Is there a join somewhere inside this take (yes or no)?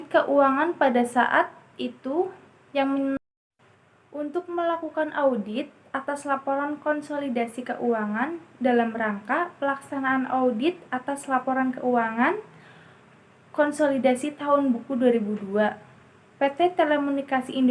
yes